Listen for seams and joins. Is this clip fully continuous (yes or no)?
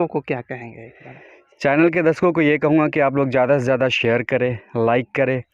yes